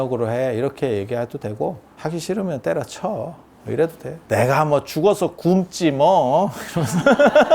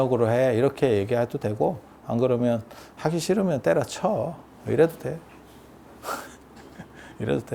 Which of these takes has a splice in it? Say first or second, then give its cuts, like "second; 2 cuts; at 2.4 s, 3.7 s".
first; 2 cuts; at 1.9 s, 4.1 s